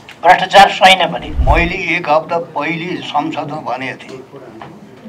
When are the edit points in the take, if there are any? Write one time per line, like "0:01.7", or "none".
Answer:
0:01.3